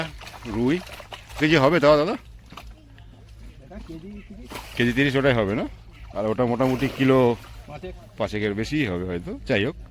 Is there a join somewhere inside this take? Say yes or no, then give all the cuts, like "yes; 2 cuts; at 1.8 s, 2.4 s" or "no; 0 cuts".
yes; 1 cut; at 1.4 s